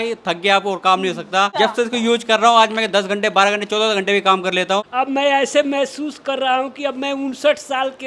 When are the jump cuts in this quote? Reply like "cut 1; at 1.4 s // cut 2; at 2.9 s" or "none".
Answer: cut 1; at 1.5 s // cut 2; at 4.9 s